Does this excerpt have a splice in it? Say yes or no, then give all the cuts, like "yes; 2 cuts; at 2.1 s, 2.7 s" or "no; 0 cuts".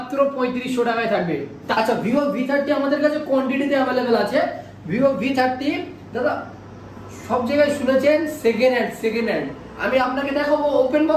yes; 1 cut; at 1.6 s